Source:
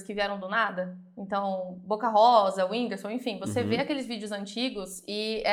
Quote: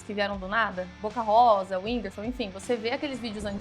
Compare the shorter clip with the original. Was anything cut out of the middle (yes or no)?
yes